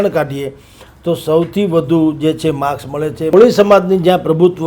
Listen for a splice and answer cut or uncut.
cut